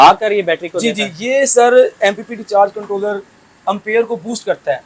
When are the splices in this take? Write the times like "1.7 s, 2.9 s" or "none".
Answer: none